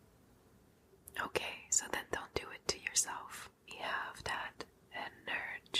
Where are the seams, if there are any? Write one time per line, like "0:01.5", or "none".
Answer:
0:03.7